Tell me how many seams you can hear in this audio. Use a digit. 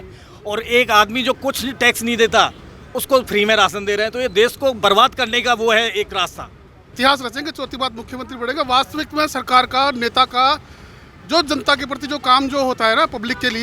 1